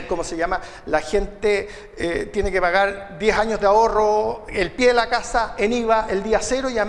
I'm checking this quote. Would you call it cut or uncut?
uncut